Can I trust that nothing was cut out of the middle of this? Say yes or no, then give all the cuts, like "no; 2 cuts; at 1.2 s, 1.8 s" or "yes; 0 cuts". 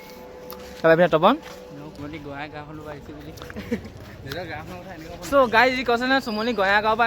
no; 2 cuts; at 2.0 s, 3.9 s